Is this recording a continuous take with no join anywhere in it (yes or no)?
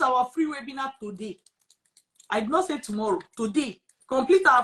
yes